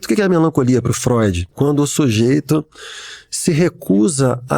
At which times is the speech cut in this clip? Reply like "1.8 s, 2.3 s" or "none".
1.5 s